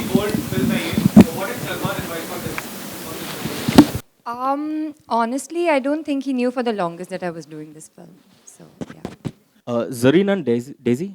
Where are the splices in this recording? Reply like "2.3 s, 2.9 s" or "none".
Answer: 9.5 s

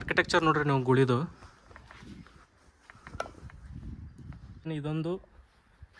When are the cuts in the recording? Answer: 4.7 s

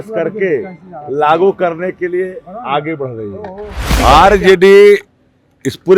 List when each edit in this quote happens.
3.9 s

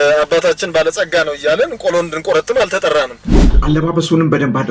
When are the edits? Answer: 3.6 s

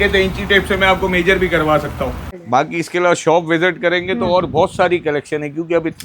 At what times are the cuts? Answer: 2.3 s

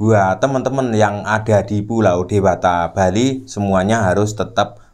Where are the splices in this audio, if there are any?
none

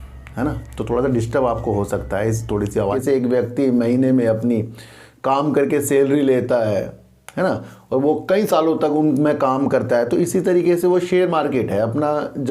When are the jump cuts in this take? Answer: 2.8 s

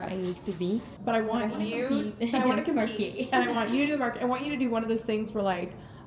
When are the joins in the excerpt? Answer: 0.9 s

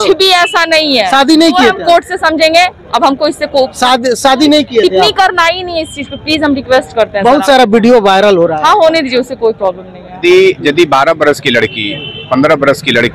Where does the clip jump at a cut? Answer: 10.2 s

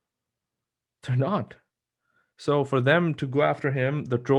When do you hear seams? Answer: none

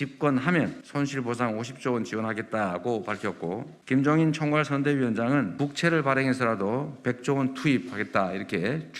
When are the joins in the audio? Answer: none

